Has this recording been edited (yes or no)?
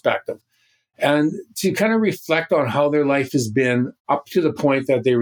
yes